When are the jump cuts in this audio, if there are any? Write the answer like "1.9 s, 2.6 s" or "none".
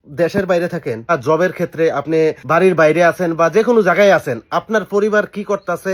1.1 s, 2.4 s